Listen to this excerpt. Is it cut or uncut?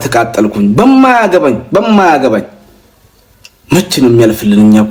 uncut